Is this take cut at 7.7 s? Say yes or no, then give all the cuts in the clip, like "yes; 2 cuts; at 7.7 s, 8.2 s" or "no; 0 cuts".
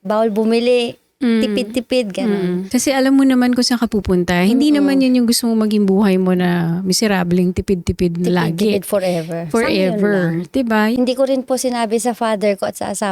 no; 2 cuts; at 2.6 s, 11.0 s